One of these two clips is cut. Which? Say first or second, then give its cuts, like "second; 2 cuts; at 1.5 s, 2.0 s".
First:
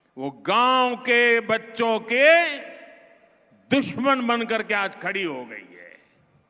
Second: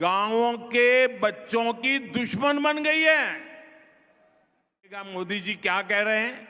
second; 1 cut; at 5.1 s